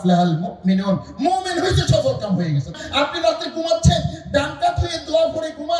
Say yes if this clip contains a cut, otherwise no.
yes